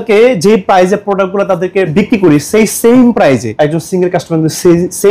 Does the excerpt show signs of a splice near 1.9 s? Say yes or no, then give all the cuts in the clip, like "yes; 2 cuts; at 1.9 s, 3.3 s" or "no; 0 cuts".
yes; 2 cuts; at 1.9 s, 3.5 s